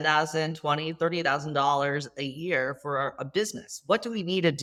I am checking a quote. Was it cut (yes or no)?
no